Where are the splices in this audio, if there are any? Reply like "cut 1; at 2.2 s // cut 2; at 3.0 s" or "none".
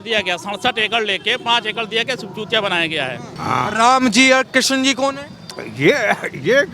cut 1; at 3.3 s